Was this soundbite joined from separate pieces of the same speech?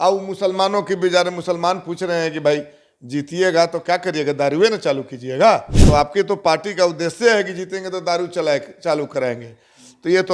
yes; 1 cut; at 5.7 s

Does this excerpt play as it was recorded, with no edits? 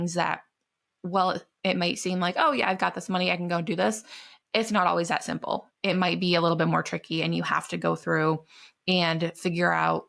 yes; 0 cuts

